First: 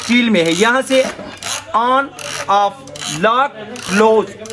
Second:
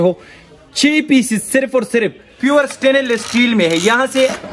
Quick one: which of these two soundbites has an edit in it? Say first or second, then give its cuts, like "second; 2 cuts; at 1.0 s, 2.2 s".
second; 1 cut; at 2.2 s